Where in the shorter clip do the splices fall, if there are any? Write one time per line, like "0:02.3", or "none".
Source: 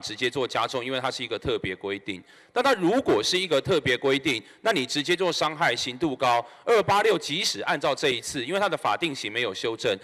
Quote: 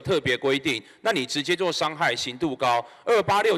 none